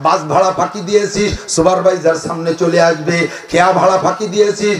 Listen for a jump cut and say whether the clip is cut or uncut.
uncut